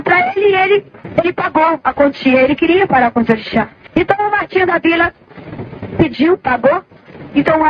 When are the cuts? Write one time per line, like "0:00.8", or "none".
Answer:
0:01.0
0:03.8